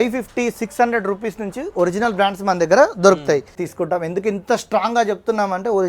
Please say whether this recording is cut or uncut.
cut